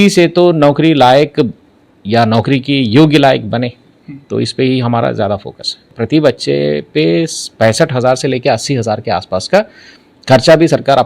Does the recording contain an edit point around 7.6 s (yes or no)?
no